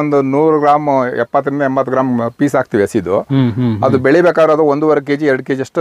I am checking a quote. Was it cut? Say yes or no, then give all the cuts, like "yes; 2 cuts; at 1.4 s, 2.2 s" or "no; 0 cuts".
no; 0 cuts